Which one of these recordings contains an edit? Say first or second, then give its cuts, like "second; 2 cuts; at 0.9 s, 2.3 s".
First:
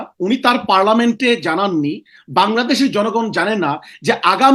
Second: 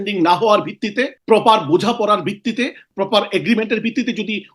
second; 2 cuts; at 1.2 s, 2.8 s